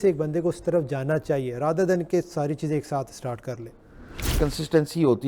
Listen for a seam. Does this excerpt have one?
yes; 1 cut; at 4.2 s

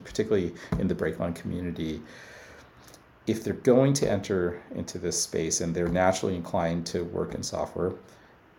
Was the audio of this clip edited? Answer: no; 0 cuts

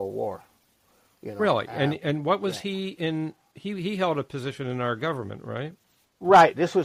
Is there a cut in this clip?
no; 0 cuts

